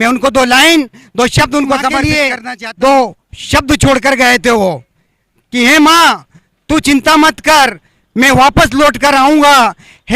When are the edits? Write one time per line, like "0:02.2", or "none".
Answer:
0:02.1